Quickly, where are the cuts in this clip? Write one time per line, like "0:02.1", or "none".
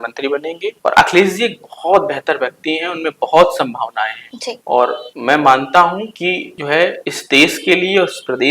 none